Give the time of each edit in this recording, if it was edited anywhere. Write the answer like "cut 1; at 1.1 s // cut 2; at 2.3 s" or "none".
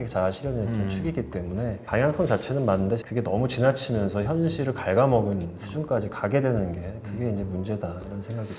cut 1; at 3.0 s